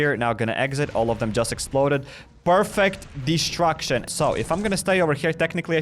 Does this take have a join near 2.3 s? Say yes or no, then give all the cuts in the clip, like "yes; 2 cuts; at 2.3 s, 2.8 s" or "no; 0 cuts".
no; 1 cut; at 4.1 s